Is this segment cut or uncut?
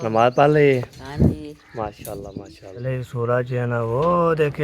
cut